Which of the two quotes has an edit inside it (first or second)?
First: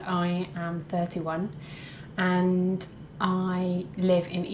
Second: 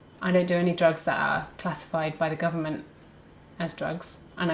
second